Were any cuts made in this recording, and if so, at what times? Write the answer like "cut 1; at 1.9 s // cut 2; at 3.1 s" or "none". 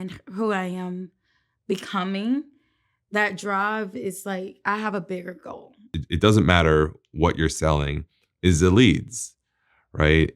cut 1; at 6.0 s